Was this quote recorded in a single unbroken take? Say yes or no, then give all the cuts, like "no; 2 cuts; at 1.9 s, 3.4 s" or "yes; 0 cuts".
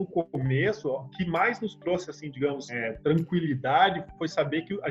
no; 2 cuts; at 1.2 s, 2.8 s